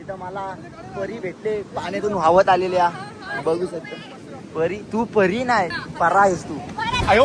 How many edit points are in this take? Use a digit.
1